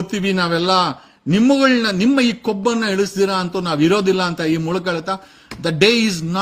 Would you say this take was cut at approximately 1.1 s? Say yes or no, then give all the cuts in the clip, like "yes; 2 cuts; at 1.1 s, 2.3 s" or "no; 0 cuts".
no; 0 cuts